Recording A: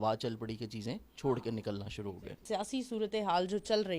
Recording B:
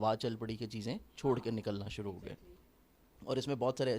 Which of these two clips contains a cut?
A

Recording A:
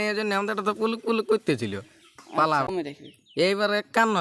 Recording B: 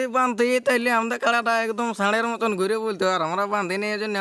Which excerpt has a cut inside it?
A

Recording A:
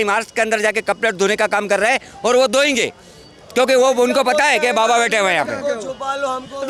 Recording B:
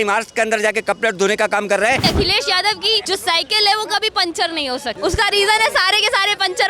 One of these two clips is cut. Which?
B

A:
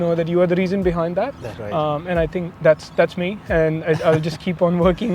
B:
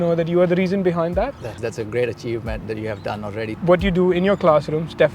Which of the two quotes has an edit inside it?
B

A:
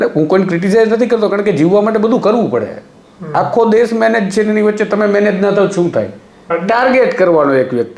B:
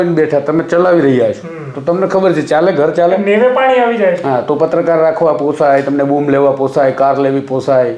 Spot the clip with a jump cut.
A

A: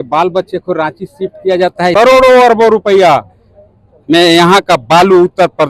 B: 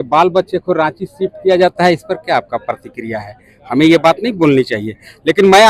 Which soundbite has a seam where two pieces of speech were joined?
A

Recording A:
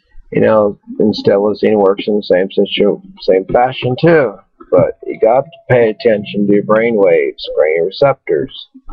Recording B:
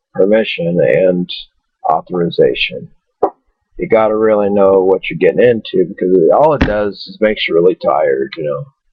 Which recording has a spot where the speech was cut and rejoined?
A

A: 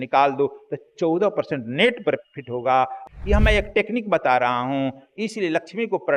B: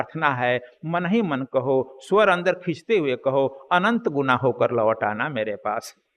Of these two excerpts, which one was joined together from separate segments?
A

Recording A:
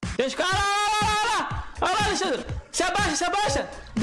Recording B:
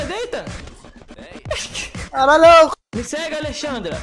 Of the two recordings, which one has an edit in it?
B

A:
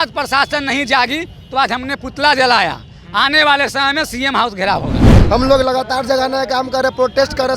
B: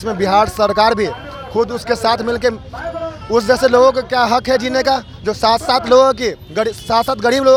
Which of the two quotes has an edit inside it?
A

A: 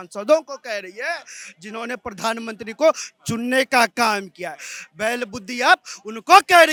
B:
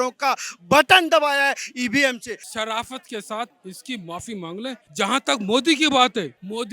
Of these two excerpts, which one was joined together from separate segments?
B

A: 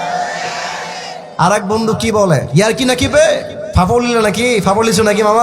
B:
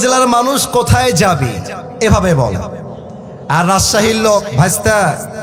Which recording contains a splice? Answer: A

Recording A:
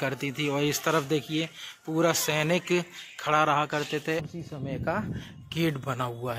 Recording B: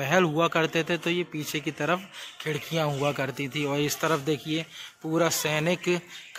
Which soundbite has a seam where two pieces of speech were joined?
A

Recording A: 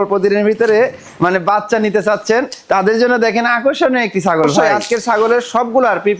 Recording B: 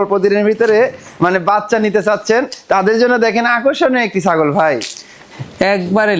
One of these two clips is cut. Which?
A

